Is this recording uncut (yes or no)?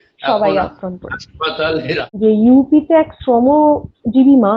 no